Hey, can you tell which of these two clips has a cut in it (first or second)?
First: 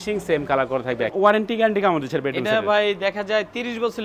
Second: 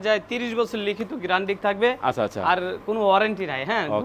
first